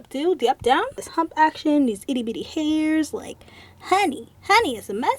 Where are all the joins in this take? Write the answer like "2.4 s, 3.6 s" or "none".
1.0 s, 4.3 s